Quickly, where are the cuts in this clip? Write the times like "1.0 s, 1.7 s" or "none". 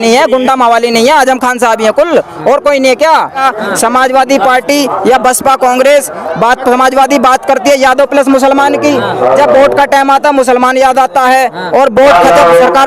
3.4 s